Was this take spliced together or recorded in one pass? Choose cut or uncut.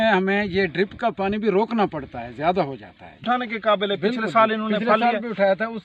cut